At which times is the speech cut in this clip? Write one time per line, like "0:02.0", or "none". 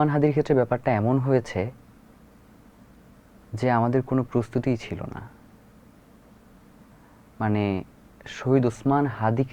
none

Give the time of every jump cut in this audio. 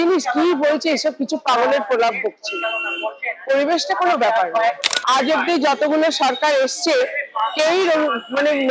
none

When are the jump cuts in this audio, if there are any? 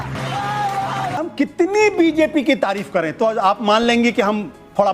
0:01.3

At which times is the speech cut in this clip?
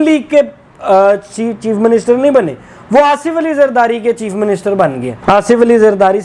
0:05.1

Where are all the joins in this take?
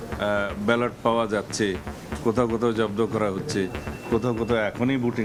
none

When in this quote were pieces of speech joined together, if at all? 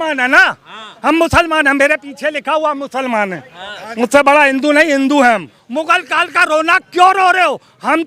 0:05.6

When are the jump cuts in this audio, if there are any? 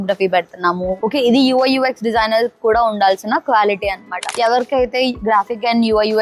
0:04.3

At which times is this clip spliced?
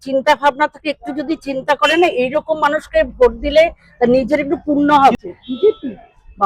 0:05.1

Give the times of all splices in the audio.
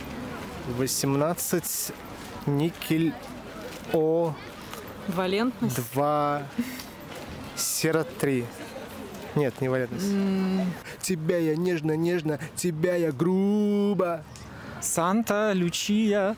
0:10.9

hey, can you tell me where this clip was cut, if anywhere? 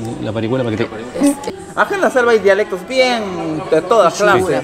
0:01.5

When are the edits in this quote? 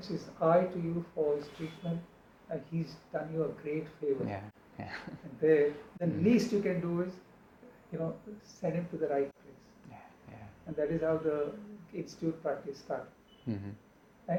none

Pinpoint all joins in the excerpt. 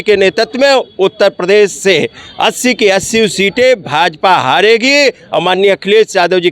none

